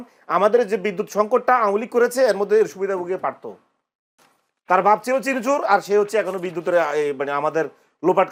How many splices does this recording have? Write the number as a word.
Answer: zero